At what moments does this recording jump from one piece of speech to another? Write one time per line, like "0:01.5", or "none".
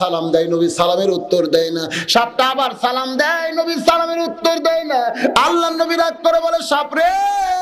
none